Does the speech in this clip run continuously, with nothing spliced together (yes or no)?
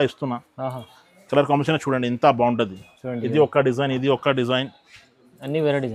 yes